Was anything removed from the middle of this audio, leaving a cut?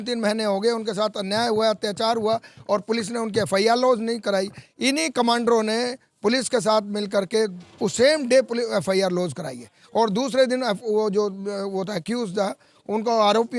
no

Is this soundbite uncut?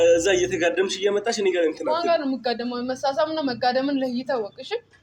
yes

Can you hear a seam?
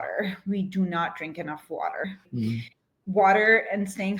yes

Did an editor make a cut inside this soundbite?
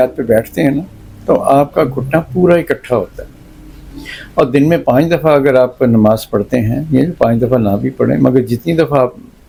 no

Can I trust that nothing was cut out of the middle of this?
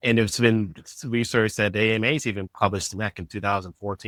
yes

